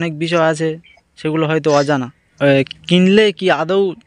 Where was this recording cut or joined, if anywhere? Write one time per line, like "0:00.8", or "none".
0:02.3